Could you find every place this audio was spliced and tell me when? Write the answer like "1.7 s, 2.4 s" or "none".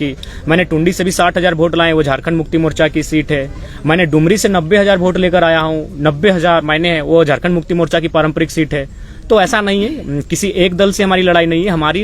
none